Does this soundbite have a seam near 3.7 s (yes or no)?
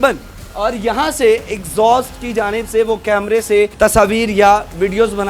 yes